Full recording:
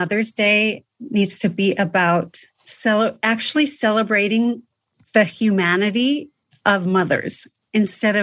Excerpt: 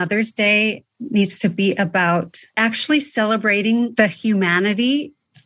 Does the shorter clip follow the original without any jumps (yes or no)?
no